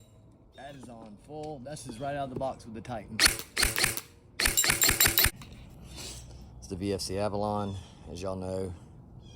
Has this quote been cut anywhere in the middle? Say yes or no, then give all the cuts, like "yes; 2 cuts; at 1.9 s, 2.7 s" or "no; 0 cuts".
yes; 1 cut; at 5.3 s